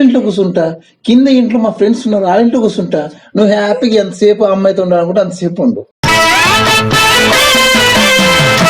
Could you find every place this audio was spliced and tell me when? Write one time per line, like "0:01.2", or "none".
0:05.9